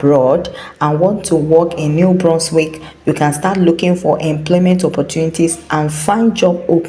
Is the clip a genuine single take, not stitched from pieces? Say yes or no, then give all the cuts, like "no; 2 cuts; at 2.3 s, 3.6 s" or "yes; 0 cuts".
yes; 0 cuts